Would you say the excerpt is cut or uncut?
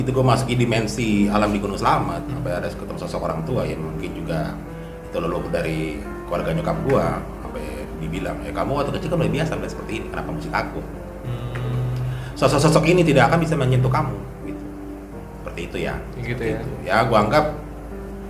uncut